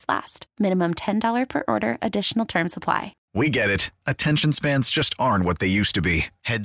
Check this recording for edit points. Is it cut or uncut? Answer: cut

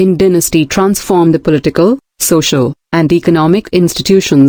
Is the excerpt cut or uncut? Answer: uncut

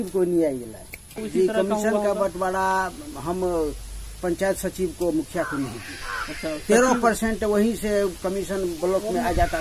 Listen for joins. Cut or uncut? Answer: cut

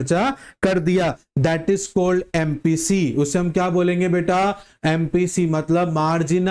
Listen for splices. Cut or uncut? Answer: uncut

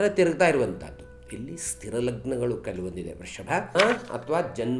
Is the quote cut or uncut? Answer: cut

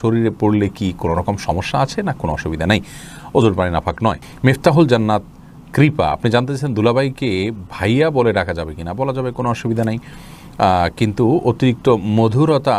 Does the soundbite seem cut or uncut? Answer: uncut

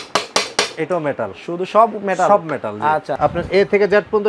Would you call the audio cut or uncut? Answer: cut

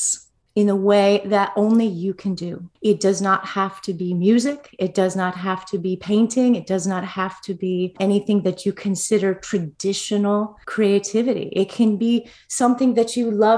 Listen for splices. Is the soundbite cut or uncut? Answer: uncut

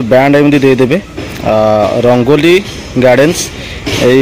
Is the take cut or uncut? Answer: uncut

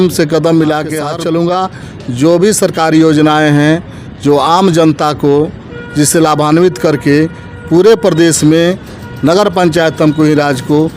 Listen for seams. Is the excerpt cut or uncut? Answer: cut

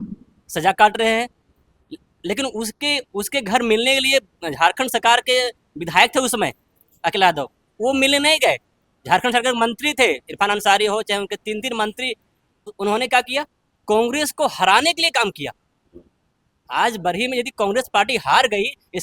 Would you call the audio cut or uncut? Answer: cut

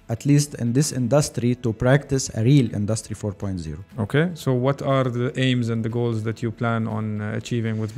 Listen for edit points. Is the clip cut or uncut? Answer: uncut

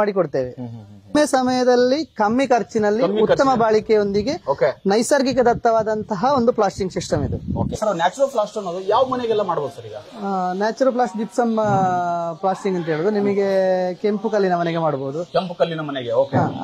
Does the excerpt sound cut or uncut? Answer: cut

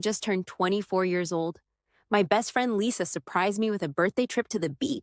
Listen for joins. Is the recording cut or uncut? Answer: cut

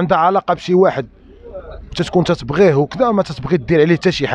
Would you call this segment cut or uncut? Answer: uncut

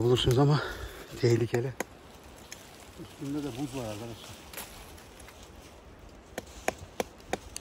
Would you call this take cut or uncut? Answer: cut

